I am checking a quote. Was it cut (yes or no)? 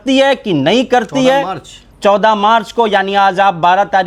no